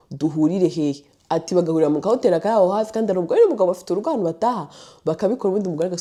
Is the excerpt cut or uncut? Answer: uncut